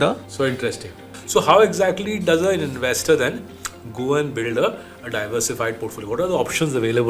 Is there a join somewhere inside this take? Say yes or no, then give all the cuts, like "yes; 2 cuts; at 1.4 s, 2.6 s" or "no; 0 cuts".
yes; 1 cut; at 1.1 s